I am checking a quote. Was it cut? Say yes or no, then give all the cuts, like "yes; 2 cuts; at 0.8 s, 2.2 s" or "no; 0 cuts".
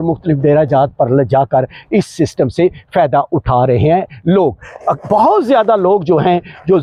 no; 0 cuts